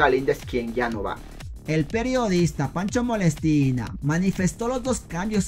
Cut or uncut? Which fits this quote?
uncut